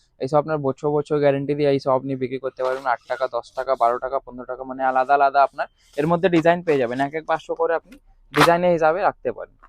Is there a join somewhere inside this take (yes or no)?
no